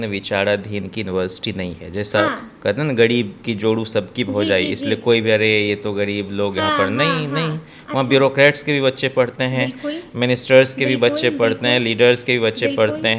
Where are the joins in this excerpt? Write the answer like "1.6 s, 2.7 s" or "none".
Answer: none